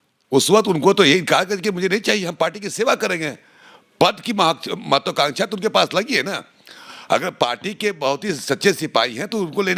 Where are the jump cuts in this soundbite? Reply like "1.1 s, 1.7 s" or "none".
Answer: none